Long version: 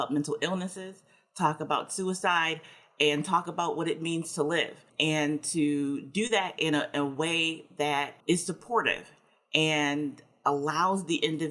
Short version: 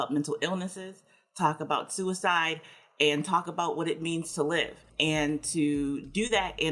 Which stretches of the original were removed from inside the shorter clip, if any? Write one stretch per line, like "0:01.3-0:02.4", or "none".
none